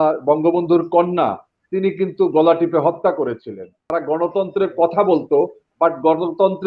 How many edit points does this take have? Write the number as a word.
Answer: one